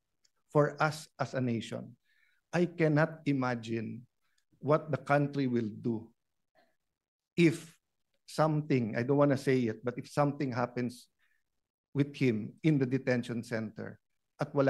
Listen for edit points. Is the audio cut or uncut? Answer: uncut